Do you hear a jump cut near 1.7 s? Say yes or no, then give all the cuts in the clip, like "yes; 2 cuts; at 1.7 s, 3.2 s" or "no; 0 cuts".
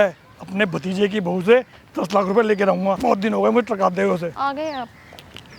no; 2 cuts; at 3.0 s, 4.3 s